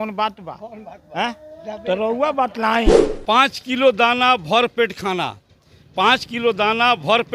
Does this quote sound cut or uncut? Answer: cut